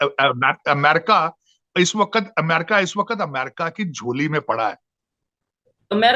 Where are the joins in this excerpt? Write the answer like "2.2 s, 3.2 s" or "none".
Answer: none